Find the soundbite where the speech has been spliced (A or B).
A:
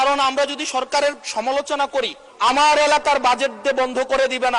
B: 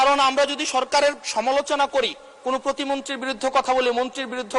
A